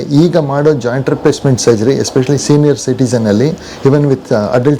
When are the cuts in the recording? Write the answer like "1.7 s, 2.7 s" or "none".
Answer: none